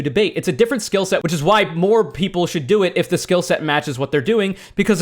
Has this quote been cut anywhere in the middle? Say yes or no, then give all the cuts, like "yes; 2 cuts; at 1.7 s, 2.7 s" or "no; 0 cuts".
yes; 1 cut; at 1.2 s